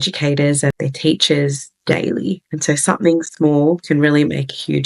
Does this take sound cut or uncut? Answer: uncut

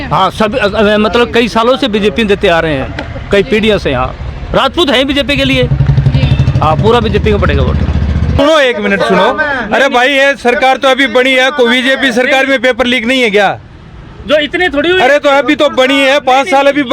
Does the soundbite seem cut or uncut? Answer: cut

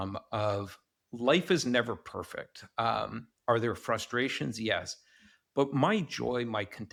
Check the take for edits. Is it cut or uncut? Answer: uncut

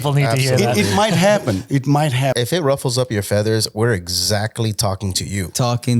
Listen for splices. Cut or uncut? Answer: cut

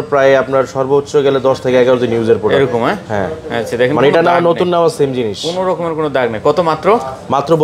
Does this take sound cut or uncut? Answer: uncut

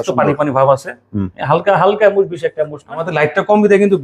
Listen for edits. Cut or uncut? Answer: cut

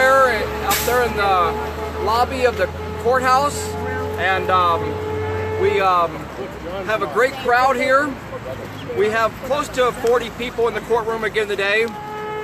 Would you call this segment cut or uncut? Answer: cut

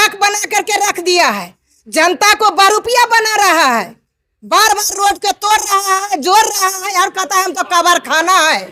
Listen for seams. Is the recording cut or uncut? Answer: uncut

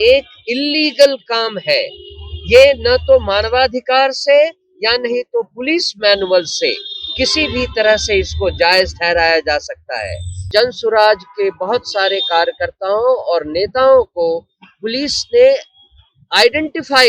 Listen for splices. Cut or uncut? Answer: cut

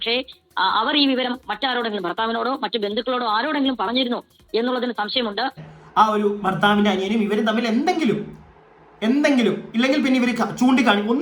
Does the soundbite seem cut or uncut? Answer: cut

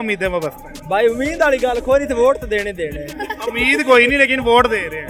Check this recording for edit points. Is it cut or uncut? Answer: uncut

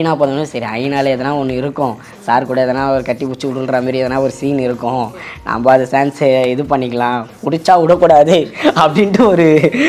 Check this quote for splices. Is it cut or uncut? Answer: uncut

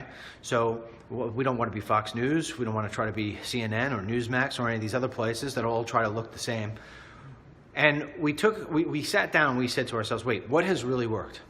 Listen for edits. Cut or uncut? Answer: cut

